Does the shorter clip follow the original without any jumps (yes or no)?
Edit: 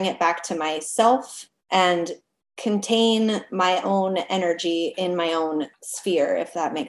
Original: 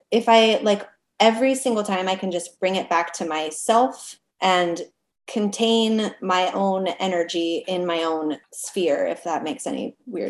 yes